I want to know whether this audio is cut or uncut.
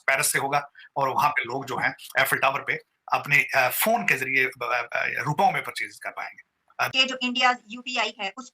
cut